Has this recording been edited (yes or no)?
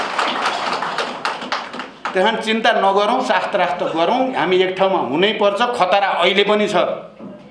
no